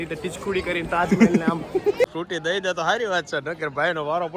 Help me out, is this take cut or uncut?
cut